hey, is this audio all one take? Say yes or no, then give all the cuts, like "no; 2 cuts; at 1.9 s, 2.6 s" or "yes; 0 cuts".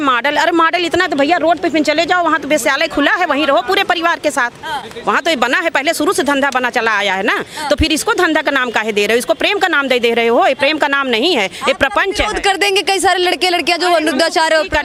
yes; 0 cuts